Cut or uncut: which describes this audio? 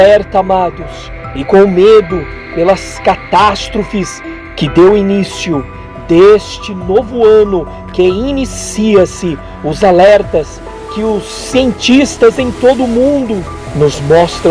uncut